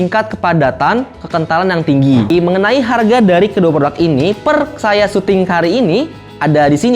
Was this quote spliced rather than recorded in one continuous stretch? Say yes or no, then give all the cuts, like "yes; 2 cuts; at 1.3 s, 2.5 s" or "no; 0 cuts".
yes; 1 cut; at 2.3 s